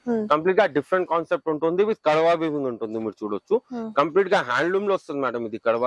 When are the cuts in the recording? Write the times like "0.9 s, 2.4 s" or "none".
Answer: none